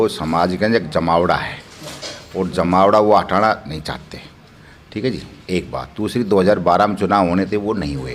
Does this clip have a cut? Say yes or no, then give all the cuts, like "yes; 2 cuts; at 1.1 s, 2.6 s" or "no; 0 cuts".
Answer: no; 0 cuts